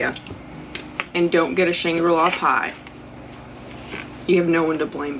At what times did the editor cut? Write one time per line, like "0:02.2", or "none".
none